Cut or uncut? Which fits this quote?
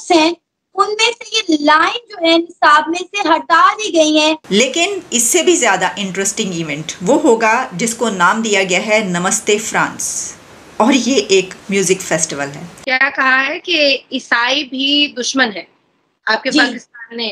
cut